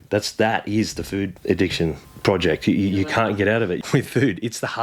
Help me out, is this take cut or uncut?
cut